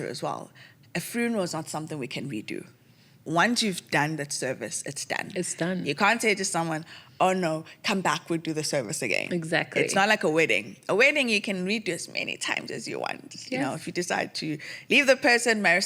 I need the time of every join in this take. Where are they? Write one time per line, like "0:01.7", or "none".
none